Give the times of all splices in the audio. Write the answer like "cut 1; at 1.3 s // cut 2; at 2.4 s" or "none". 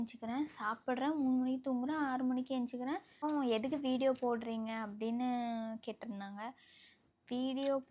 cut 1; at 3.2 s